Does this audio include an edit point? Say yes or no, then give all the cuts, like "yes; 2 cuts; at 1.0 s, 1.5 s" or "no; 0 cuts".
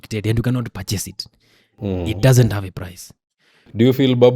no; 0 cuts